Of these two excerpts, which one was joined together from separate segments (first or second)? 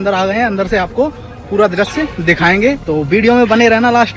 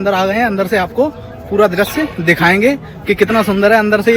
first